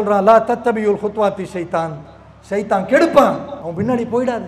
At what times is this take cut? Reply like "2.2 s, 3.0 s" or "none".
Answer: 3.6 s